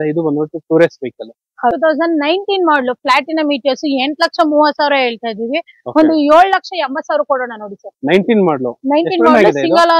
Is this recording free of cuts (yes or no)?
no